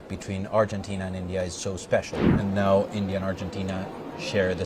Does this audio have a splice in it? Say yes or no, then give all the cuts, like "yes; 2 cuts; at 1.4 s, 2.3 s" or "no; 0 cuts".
yes; 1 cut; at 2.3 s